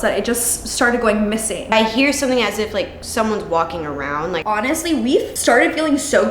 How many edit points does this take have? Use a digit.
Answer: 3